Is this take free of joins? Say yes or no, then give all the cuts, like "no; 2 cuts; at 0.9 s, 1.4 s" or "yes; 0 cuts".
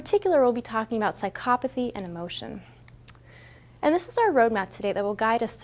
no; 1 cut; at 2.5 s